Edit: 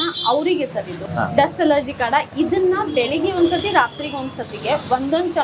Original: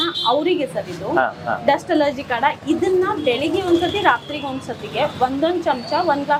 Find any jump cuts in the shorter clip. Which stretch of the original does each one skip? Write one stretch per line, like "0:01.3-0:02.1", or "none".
0:01.0-0:01.3

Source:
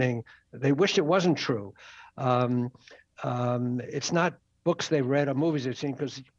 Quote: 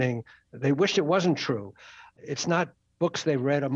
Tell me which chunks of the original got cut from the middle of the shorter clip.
0:02.2-0:03.8

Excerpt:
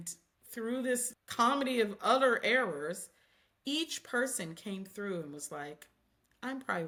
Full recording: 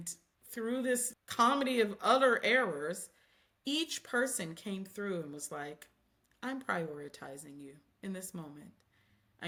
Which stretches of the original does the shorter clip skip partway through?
none

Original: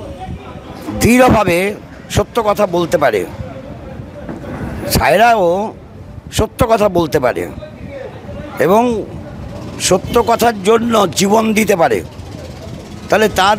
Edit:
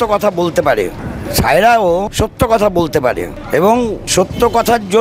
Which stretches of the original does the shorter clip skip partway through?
0:03.4-0:04.6
0:05.7-0:06.3
0:07.6-0:08.4
0:09.1-0:09.8

